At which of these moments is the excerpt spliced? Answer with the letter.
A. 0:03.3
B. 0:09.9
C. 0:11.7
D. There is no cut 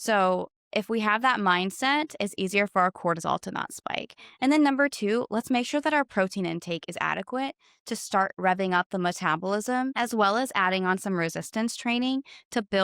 B